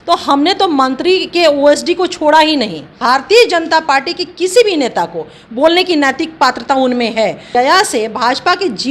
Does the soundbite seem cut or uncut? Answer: cut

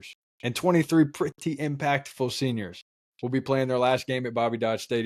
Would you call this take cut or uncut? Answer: uncut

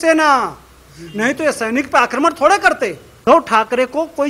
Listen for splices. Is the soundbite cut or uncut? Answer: uncut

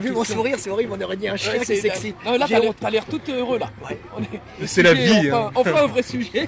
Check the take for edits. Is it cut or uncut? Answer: uncut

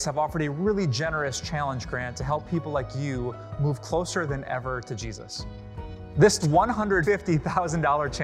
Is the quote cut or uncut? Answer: cut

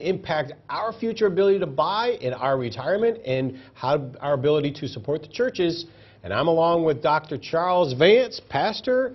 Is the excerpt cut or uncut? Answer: cut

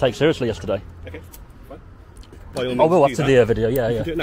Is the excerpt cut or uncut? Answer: cut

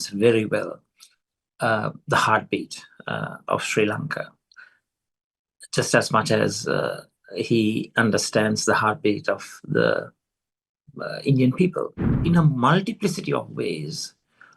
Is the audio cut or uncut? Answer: cut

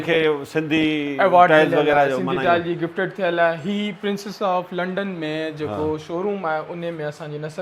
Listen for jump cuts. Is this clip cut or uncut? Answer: uncut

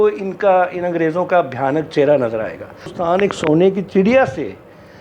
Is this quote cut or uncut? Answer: cut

